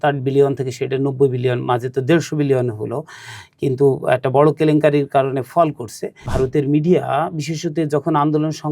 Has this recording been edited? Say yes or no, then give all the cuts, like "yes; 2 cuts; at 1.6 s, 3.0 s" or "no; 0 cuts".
yes; 1 cut; at 6.3 s